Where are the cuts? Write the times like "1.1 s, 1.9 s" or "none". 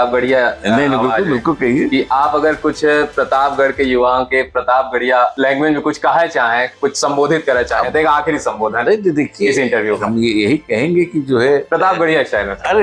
none